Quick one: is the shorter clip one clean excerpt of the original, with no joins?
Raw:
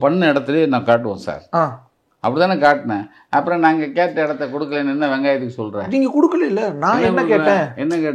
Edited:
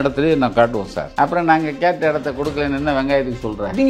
no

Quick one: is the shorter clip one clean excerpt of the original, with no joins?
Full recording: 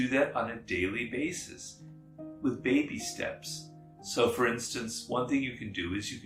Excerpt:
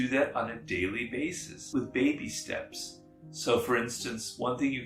no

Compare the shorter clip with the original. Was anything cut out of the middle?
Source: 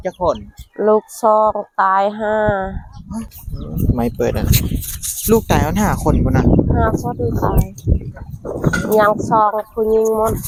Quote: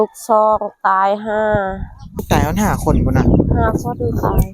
yes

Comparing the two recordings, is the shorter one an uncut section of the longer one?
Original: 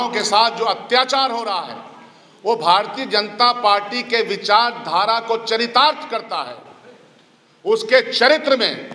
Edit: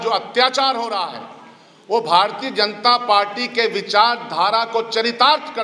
yes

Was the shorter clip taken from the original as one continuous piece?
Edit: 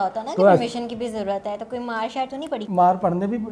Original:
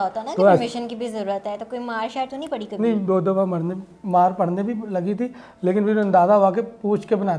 no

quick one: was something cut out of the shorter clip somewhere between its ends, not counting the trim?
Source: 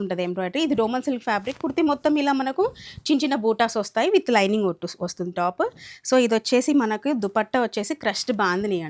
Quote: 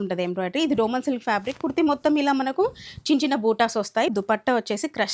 yes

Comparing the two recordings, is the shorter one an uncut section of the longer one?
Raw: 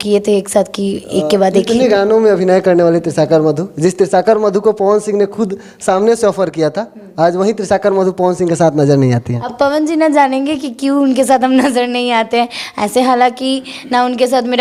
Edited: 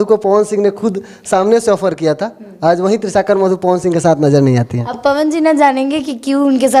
yes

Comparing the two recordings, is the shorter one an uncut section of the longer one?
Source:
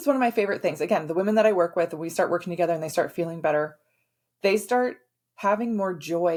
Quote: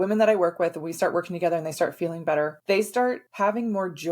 no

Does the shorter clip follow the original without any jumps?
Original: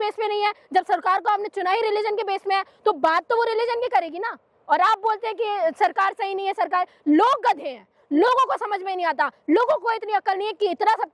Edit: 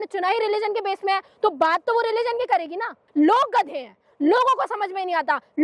no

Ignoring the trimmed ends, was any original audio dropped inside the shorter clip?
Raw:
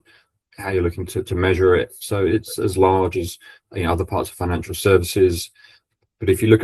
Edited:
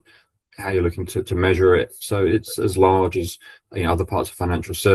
no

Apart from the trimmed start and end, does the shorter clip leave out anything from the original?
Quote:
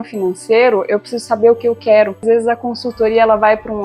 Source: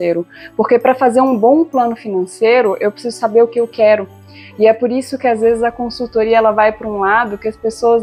yes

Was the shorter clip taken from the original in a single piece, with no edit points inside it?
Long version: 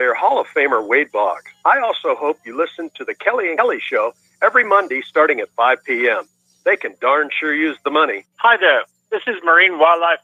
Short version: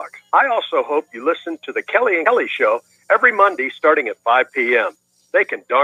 yes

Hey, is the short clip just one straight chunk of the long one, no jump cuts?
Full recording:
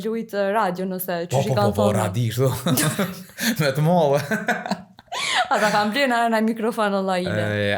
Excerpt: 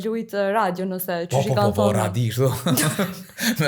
yes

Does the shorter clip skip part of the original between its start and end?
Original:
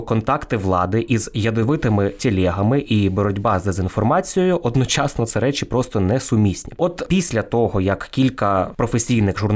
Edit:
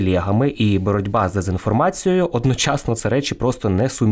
no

